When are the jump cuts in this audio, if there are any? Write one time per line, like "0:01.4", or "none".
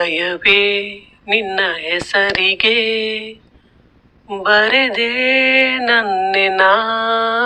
none